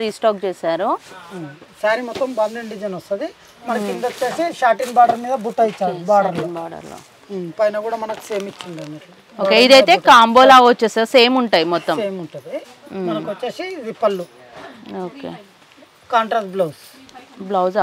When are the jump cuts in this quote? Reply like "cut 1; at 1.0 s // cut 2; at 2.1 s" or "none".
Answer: none